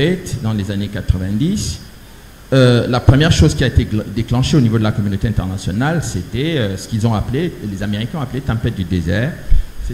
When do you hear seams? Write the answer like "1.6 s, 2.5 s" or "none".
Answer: none